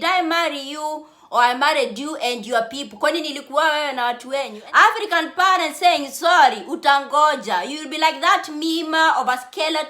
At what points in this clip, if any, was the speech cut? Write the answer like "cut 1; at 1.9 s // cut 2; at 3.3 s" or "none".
cut 1; at 4.6 s

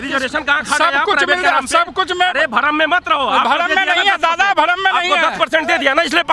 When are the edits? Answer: none

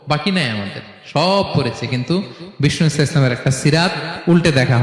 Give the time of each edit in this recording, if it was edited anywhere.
none

